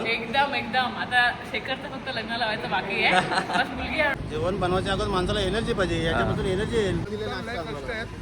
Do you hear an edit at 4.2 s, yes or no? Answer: yes